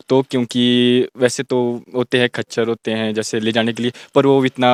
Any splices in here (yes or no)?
no